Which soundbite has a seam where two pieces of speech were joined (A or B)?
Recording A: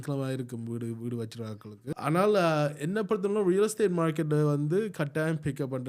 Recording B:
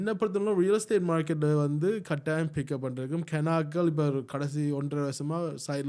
A